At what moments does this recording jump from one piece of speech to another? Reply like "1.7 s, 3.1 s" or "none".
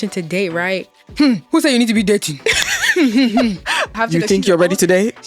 1.0 s, 3.9 s